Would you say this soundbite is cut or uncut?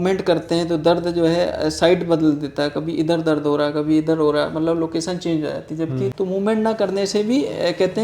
cut